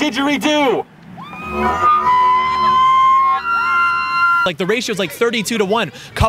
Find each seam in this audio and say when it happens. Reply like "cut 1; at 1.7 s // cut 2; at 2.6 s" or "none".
cut 1; at 4.4 s